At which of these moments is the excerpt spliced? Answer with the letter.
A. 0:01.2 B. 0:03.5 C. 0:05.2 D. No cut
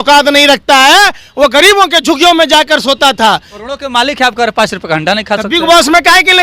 B